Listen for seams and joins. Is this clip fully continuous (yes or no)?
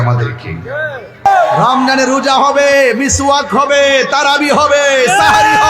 no